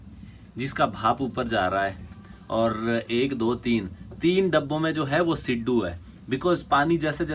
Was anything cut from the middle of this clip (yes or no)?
no